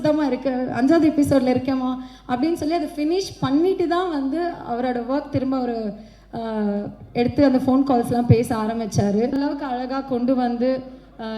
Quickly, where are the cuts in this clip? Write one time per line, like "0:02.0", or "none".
0:09.4